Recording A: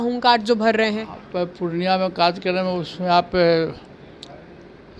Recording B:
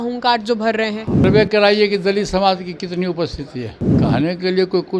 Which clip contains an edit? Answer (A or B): B